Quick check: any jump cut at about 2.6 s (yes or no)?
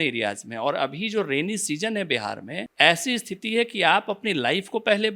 yes